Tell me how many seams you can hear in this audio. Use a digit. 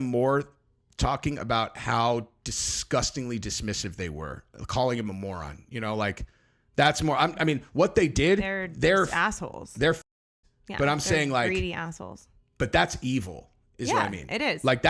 0